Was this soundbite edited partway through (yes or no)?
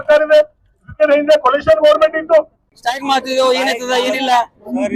yes